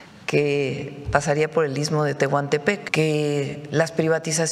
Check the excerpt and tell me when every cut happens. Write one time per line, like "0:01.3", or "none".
0:02.8